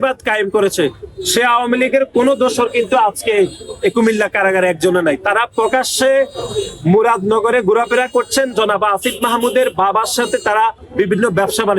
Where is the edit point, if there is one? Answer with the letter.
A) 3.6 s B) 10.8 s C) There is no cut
B